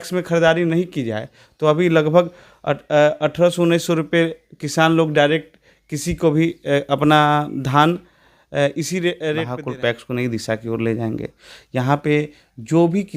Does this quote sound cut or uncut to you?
cut